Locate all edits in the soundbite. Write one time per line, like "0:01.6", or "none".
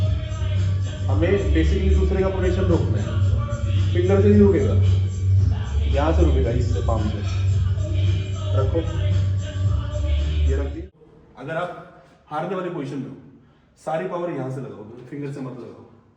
0:11.1